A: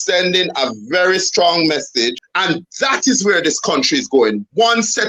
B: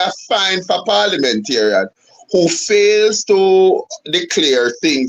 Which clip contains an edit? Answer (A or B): A